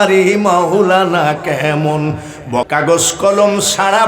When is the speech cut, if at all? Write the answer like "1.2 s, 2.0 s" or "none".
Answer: 2.7 s